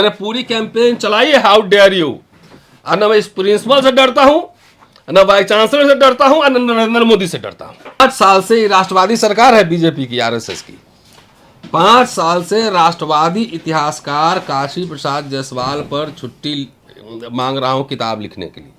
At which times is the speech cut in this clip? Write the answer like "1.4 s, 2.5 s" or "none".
8.0 s